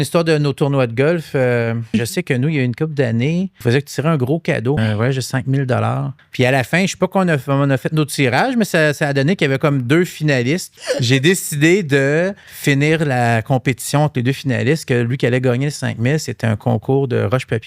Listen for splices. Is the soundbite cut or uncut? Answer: cut